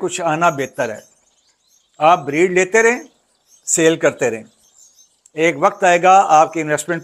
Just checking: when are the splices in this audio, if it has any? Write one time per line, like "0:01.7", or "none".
none